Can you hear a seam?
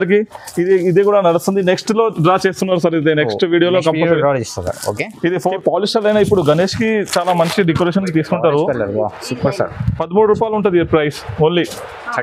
yes; 1 cut; at 5.6 s

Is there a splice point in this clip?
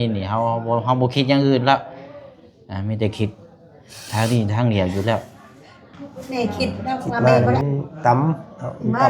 yes; 1 cut; at 7.2 s

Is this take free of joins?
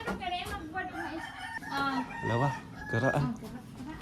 no; 1 cut; at 1.5 s

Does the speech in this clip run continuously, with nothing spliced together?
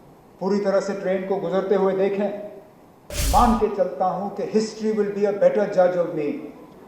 no; 1 cut; at 3.2 s

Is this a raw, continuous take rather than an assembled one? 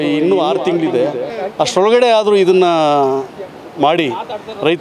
yes; 0 cuts

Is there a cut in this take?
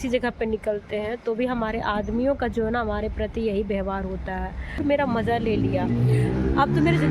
yes; 1 cut; at 4.8 s

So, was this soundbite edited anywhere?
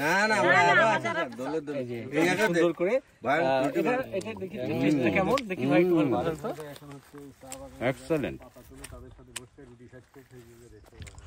no; 0 cuts

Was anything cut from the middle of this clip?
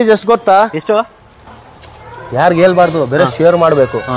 no; 0 cuts

